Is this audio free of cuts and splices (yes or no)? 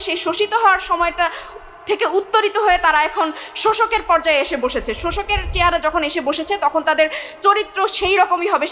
yes